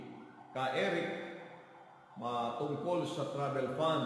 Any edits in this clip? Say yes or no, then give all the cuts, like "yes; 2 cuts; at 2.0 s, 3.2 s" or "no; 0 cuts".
no; 0 cuts